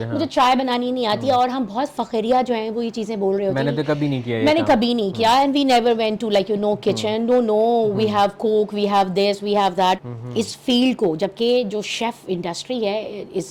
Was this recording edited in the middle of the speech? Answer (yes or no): yes